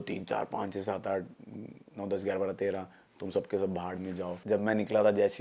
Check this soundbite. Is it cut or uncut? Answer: cut